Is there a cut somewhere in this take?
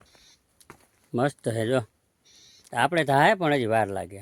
no; 0 cuts

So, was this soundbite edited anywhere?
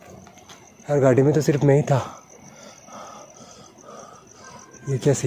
no; 0 cuts

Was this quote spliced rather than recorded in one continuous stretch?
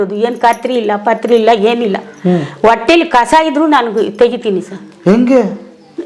no; 0 cuts

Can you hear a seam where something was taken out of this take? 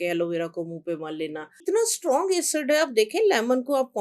yes; 1 cut; at 1.6 s

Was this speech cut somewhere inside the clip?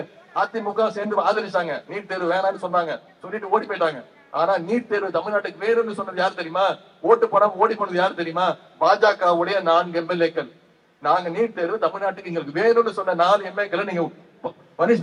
no; 0 cuts

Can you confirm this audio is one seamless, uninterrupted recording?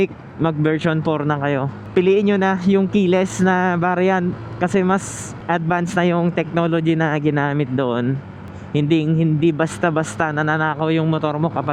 yes; 0 cuts

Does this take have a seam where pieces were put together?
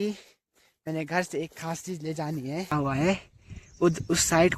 yes; 1 cut; at 2.7 s

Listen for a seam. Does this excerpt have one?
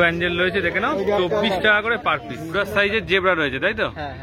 yes; 1 cut; at 2.5 s

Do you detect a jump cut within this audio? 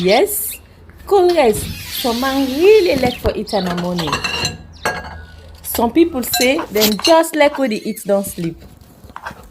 no; 0 cuts

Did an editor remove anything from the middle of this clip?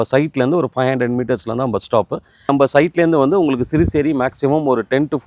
yes; 1 cut; at 2.5 s

